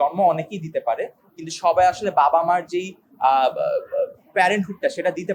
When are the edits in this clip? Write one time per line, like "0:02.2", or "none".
none

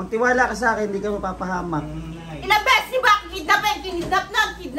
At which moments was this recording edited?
none

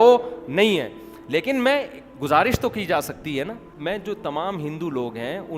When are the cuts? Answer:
0:03.7

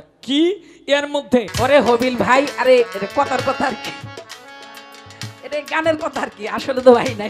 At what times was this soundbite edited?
0:01.5

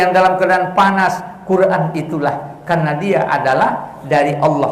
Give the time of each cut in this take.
none

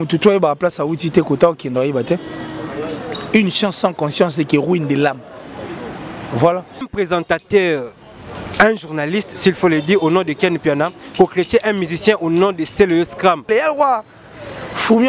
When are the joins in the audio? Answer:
0:06.8
0:13.5

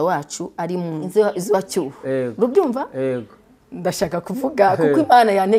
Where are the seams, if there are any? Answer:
0:01.0

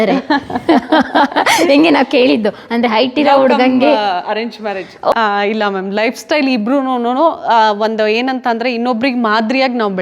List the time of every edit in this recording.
0:05.1

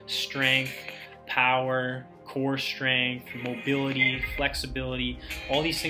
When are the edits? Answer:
none

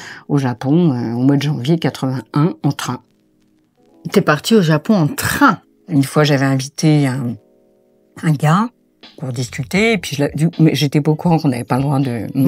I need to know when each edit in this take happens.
0:05.6

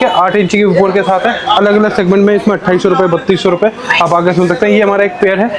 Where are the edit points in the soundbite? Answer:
none

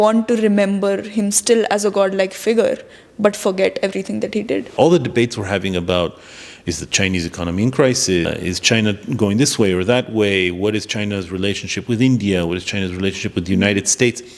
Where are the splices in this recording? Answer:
0:04.7
0:08.3

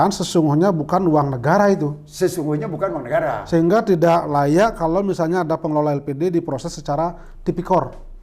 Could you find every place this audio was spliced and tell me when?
none

